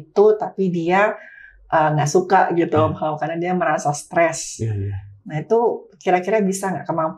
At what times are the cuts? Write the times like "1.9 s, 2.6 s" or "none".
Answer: none